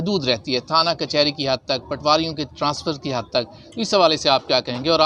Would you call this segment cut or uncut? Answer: uncut